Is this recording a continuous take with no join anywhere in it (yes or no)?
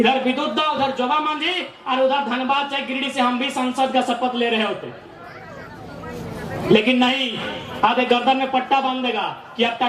yes